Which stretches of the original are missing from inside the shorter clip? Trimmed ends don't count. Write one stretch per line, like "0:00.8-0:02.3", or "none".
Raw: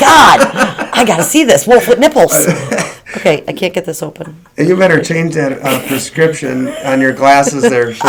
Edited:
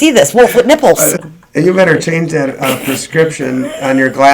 0:02.6-0:04.3